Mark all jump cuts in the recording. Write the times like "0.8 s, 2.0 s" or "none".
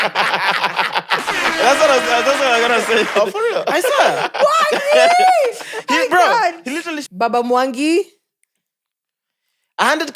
7.0 s